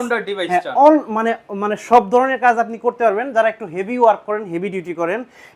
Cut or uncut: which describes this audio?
uncut